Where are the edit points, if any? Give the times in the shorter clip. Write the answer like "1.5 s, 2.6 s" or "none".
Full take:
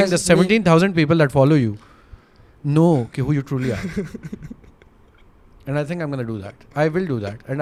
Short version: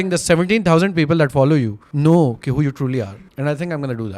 1.8 s, 3.1 s